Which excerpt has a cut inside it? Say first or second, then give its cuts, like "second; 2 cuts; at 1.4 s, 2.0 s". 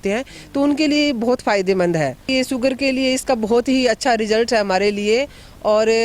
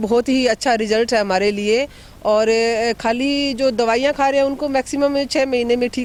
first; 1 cut; at 2.3 s